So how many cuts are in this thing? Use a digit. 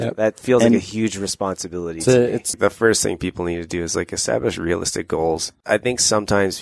2